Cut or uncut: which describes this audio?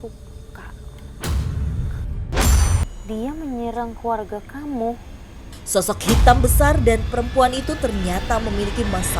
cut